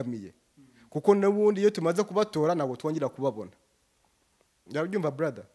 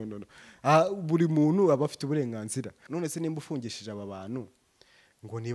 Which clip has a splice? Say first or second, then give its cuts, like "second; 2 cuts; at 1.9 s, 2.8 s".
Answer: second; 1 cut; at 2.8 s